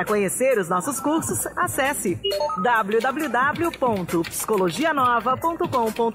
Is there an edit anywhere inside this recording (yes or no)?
no